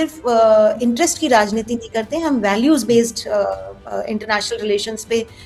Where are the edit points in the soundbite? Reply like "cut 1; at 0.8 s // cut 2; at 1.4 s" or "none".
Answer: none